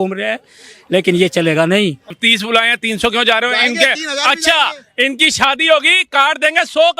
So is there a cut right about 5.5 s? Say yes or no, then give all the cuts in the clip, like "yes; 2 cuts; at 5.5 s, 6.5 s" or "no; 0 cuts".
no; 1 cut; at 2.2 s